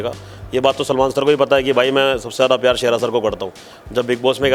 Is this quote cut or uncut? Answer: uncut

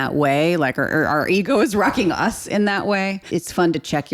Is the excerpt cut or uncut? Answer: cut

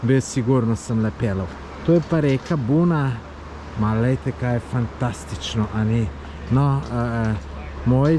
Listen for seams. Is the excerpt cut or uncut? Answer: uncut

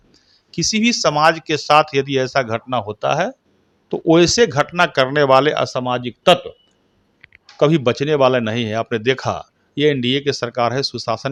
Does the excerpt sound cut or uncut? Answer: uncut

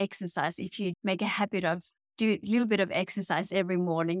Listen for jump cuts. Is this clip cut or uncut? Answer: cut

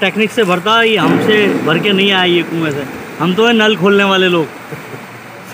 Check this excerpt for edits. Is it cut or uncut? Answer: uncut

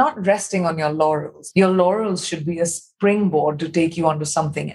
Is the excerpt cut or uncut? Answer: cut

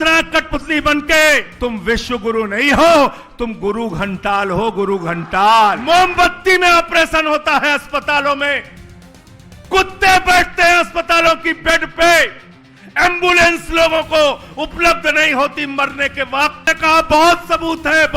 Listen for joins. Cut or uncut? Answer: cut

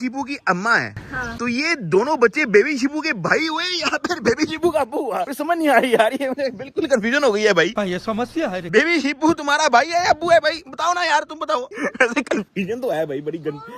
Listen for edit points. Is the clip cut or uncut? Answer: uncut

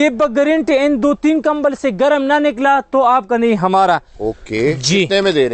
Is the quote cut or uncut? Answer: uncut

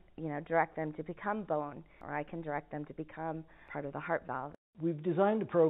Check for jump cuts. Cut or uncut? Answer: cut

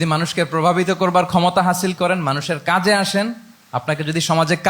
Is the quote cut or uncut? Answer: uncut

